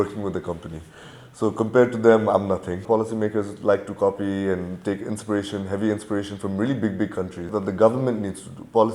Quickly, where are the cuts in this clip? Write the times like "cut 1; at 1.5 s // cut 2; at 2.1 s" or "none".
cut 1; at 2.8 s // cut 2; at 7.4 s